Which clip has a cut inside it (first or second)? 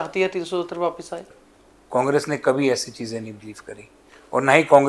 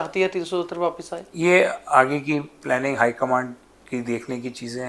first